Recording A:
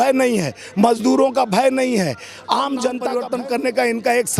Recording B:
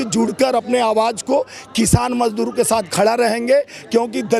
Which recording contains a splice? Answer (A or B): A